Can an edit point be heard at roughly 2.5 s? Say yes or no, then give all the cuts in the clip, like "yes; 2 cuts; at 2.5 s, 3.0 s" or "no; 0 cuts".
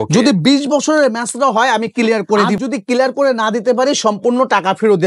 yes; 1 cut; at 2.5 s